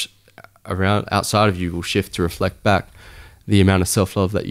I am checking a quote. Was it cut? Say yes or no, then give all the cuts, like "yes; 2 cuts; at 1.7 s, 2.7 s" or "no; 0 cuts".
no; 0 cuts